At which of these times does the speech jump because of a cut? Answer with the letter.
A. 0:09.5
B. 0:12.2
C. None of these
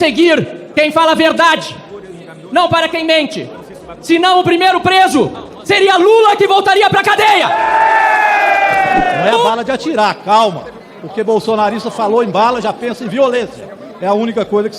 A